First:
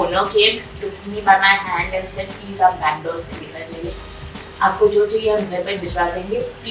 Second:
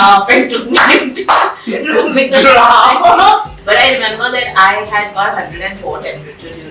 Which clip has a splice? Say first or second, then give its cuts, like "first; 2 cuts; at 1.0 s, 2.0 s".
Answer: second; 1 cut; at 3.5 s